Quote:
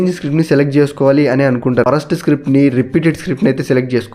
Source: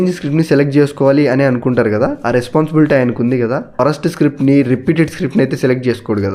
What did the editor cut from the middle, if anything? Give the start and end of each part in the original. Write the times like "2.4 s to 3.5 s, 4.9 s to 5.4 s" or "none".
1.8 s to 3.8 s